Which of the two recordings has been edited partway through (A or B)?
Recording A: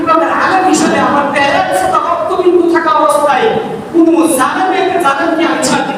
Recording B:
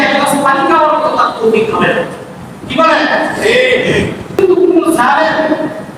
B